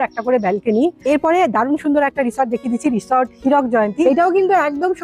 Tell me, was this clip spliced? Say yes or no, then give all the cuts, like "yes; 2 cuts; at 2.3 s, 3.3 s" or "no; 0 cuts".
yes; 2 cuts; at 1.0 s, 4.0 s